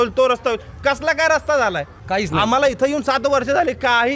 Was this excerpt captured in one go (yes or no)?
no